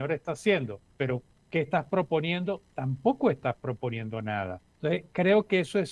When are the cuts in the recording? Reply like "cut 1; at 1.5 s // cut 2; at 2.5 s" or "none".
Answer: cut 1; at 1.2 s // cut 2; at 4.6 s